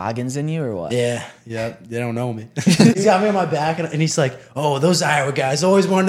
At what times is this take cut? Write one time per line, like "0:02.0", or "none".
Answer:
0:02.9